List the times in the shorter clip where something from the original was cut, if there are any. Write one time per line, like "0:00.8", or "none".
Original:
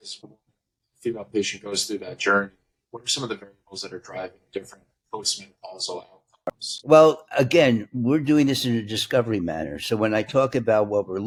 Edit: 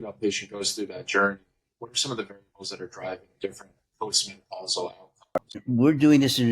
0:05.6

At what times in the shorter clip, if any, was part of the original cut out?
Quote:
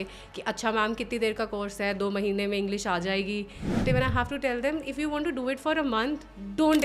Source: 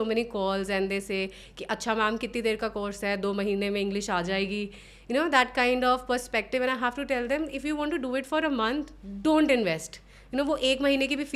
0:03.8

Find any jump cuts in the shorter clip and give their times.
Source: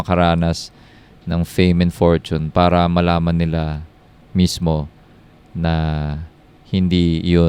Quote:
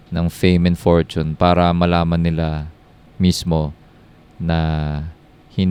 none

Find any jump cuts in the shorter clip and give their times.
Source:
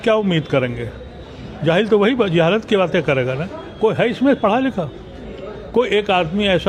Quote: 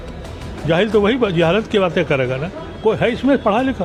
none

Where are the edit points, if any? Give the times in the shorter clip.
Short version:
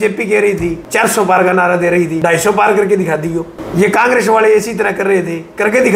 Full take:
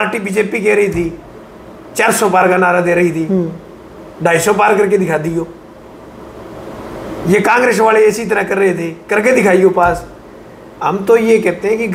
0:00.8
0:02.1
0:03.6

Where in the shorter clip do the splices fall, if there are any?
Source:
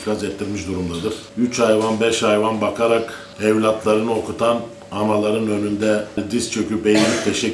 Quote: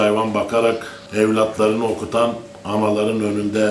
none

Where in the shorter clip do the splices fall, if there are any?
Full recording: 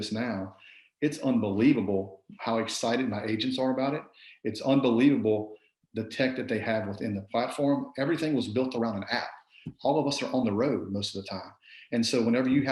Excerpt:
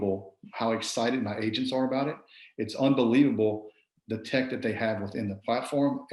none

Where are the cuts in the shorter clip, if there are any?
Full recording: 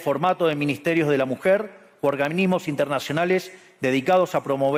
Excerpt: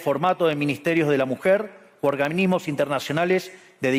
none

